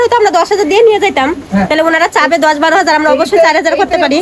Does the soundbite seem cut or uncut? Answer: uncut